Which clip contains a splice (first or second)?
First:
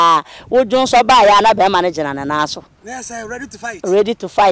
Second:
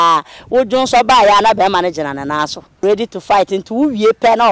second